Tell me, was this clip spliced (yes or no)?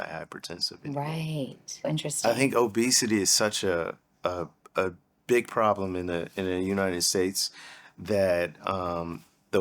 yes